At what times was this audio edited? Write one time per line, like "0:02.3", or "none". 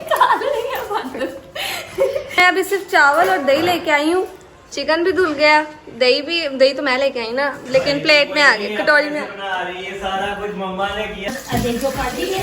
0:02.3
0:11.2